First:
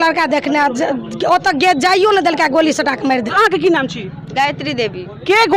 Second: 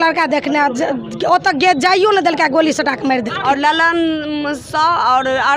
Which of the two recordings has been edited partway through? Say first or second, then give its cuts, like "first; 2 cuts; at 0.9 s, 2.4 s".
second; 1 cut; at 3.3 s